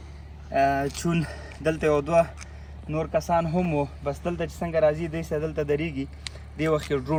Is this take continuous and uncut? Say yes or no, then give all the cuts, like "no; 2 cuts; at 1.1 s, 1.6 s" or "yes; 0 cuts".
yes; 0 cuts